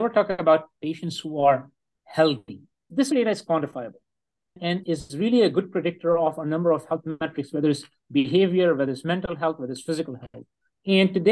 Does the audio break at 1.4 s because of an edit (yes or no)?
no